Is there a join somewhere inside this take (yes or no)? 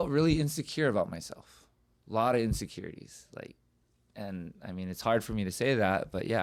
no